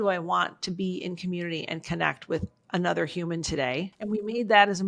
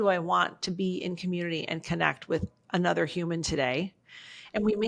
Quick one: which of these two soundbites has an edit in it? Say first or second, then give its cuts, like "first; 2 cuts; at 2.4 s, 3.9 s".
first; 1 cut; at 3.9 s